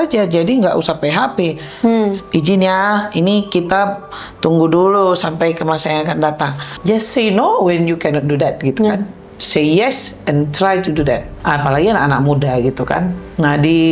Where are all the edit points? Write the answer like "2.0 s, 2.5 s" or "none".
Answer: 6.6 s, 11.3 s